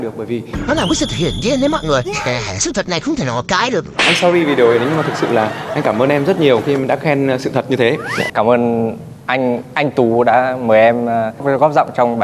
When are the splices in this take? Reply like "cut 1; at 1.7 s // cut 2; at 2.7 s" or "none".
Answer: cut 1; at 8.3 s